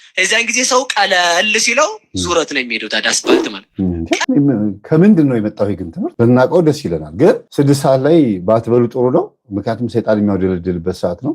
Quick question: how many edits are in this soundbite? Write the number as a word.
one